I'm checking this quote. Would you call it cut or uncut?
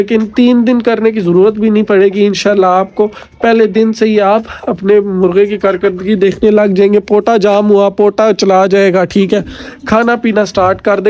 uncut